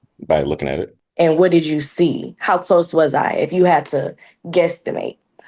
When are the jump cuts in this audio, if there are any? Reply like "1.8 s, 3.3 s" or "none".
none